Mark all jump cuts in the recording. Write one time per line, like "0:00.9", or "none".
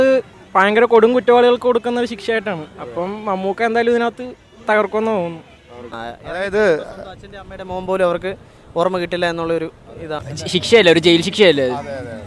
0:06.0
0:10.3